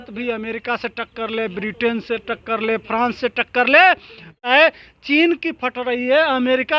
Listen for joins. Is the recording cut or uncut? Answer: cut